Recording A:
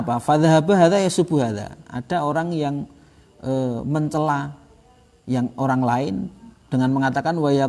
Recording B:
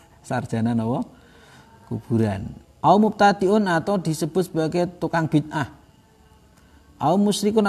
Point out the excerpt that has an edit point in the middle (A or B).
B